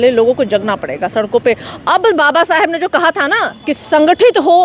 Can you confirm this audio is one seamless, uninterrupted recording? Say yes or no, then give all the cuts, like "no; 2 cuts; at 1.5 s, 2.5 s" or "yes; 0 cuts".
no; 1 cut; at 3.5 s